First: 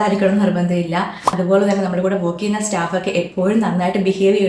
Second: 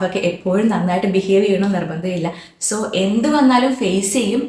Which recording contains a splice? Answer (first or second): first